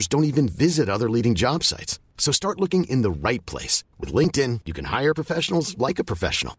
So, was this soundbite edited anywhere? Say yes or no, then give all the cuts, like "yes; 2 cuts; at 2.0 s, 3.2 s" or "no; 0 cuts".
no; 0 cuts